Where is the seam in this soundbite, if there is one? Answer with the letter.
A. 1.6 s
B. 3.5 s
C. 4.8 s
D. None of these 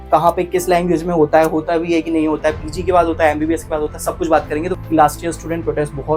C